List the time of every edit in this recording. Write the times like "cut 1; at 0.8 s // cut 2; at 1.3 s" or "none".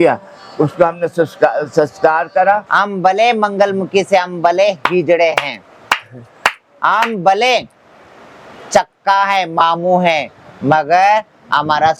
cut 1; at 2.7 s